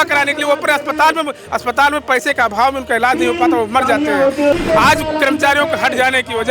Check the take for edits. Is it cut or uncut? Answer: cut